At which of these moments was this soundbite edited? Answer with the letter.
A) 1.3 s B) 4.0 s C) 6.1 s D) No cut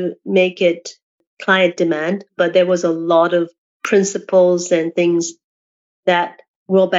A